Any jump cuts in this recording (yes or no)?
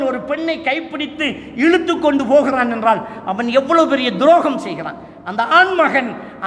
no